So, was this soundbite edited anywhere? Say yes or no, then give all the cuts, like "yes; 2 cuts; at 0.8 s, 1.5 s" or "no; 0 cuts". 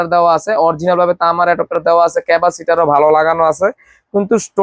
no; 0 cuts